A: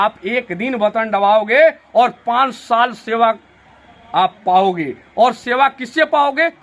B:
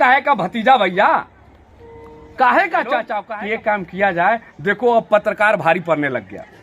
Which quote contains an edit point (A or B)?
B